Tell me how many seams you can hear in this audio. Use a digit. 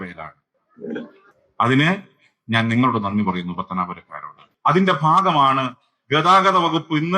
1